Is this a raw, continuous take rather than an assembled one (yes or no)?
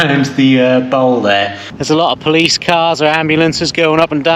no